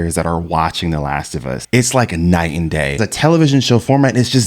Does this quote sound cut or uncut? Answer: cut